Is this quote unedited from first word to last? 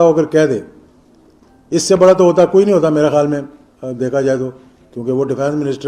yes; 0 cuts

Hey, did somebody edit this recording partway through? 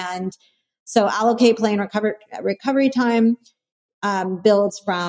no; 0 cuts

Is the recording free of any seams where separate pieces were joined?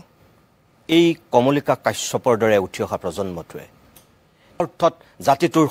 no; 1 cut; at 4.6 s

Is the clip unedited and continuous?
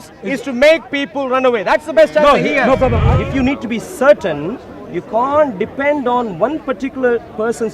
no; 1 cut; at 3.1 s

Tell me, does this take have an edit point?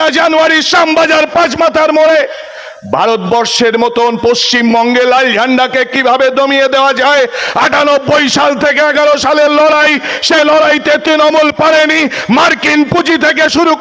no; 0 cuts

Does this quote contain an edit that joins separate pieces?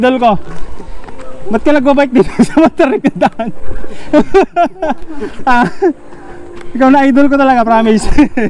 no; 0 cuts

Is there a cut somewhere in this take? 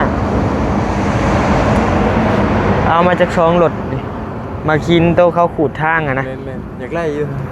no; 0 cuts

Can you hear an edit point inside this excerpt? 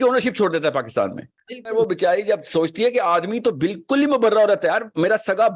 yes; 1 cut; at 1.7 s

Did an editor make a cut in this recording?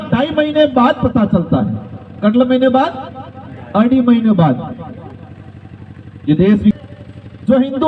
yes; 1 cut; at 6.8 s

